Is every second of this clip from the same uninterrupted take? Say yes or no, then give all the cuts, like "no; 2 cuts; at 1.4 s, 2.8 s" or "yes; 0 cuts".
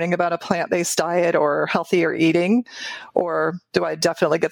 yes; 0 cuts